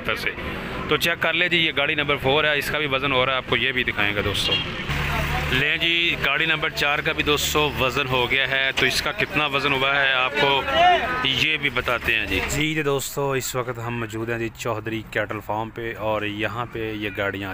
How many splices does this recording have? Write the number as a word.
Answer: one